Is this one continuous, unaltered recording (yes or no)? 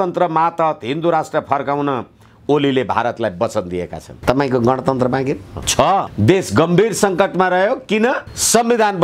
no